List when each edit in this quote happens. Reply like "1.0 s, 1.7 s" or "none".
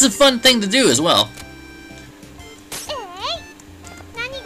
2.9 s